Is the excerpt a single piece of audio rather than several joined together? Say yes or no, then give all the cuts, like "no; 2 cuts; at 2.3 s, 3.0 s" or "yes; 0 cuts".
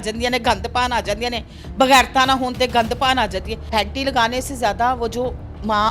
no; 1 cut; at 3.6 s